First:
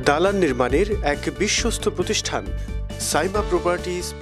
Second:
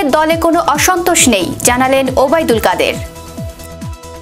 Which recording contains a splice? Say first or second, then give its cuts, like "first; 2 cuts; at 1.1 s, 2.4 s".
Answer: second; 1 cut; at 3.0 s